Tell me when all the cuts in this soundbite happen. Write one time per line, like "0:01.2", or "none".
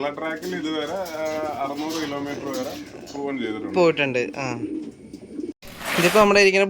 0:05.6